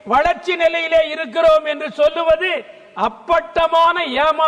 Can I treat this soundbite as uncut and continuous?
yes; 0 cuts

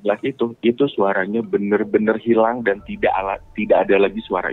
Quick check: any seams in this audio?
no; 0 cuts

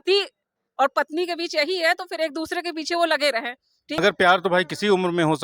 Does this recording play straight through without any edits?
no; 1 cut; at 4.0 s

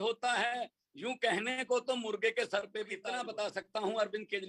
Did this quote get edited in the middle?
yes; 1 cut; at 3.0 s

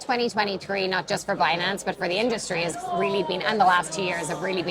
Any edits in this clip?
no; 0 cuts

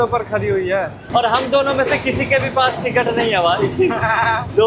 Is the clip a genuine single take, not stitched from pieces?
no; 1 cut; at 1.0 s

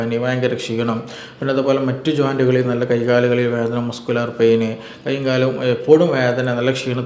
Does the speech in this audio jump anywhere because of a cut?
no; 0 cuts

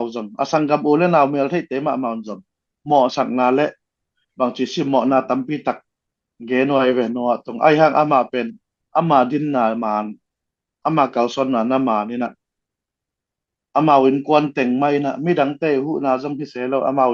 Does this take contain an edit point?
no; 0 cuts

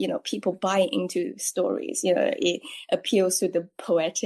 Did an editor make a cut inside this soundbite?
no; 0 cuts

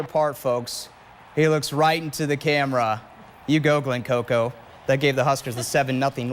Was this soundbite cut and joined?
no; 0 cuts

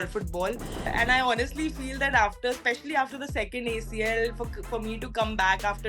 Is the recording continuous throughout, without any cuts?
no; 1 cut; at 0.9 s

